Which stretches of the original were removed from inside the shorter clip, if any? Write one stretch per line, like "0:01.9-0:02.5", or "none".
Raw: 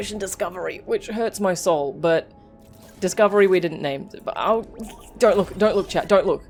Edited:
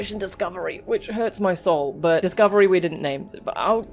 0:02.2-0:03.0

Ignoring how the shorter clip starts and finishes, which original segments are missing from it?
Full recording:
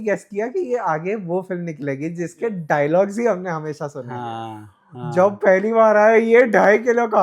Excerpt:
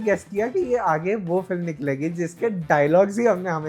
none

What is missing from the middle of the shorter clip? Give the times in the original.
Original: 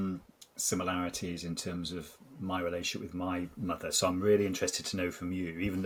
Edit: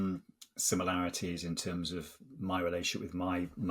none

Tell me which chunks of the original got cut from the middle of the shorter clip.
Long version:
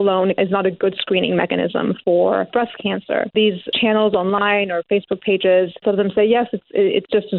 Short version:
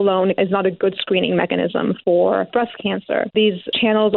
none

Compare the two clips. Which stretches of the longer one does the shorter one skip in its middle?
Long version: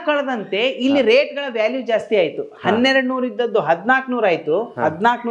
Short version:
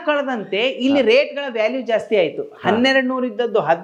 none

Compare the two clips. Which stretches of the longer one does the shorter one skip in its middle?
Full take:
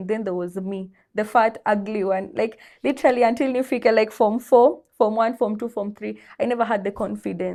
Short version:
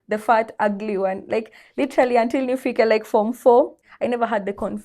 0:04.8-0:06.2

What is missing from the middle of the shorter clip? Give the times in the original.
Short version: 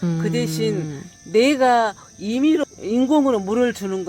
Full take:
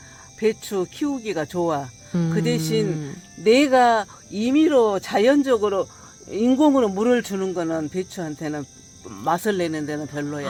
0:04.7-0:06.1

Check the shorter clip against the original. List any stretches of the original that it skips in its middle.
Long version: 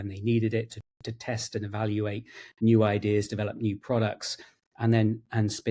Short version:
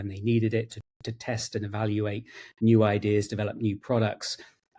none

